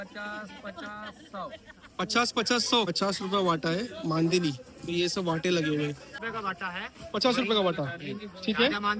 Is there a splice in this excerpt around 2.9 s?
yes; 2 cuts; at 2.9 s, 6.0 s

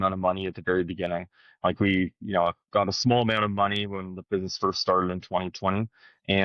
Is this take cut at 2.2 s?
no; 0 cuts

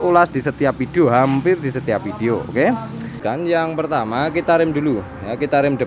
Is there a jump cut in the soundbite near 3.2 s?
yes; 1 cut; at 3.2 s

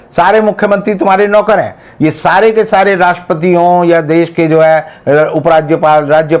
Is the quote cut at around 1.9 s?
no; 0 cuts

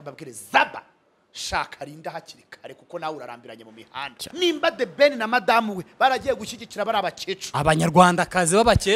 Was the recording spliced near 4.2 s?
yes; 1 cut; at 4.2 s

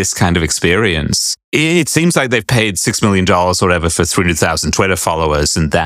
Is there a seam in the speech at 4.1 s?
no; 1 cut; at 1.4 s

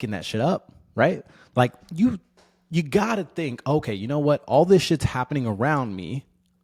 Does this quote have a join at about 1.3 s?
no; 0 cuts

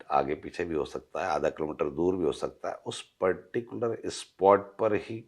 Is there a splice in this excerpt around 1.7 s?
no; 0 cuts

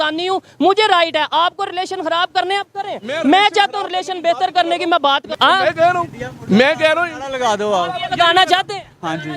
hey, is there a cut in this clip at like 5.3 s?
yes; 1 cut; at 5.3 s

